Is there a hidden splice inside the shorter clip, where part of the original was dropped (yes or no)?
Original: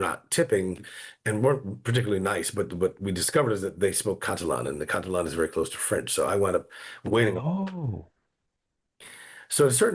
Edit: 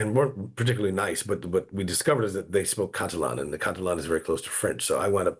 no